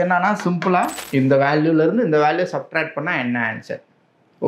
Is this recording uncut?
no; 1 cut; at 1.0 s

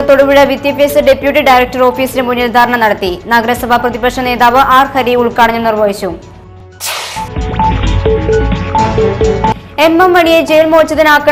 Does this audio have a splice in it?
no; 0 cuts

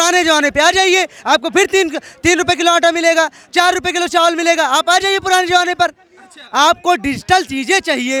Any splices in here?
no; 0 cuts

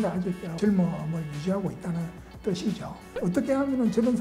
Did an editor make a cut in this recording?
yes; 1 cut; at 3.0 s

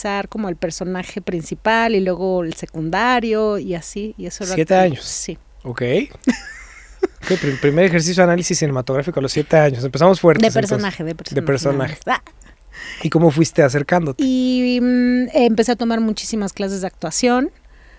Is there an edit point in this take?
no; 0 cuts

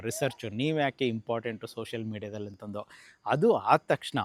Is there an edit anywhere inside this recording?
no; 0 cuts

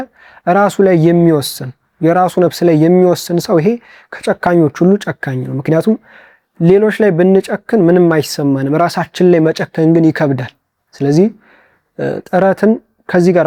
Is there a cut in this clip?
no; 0 cuts

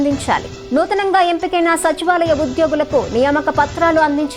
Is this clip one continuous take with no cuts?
yes; 0 cuts

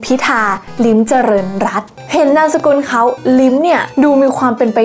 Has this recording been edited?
no; 0 cuts

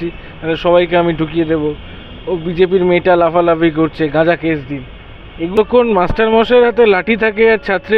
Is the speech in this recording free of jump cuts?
no; 1 cut; at 5.5 s

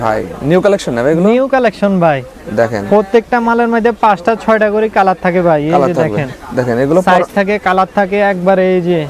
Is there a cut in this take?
no; 0 cuts

